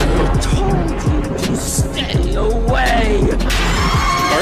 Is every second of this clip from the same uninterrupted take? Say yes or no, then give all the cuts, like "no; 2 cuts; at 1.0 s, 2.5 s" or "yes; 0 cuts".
yes; 0 cuts